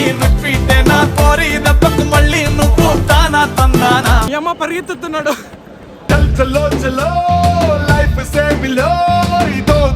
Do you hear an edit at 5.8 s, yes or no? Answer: no